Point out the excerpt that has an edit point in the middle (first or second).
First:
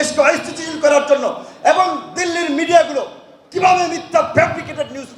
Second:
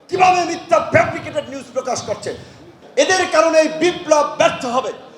second